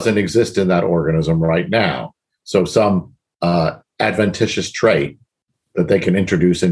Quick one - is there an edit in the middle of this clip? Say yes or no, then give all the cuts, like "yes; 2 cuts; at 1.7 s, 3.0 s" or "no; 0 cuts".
no; 0 cuts